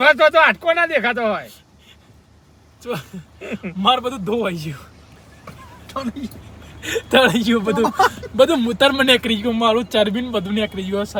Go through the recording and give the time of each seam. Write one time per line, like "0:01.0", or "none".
none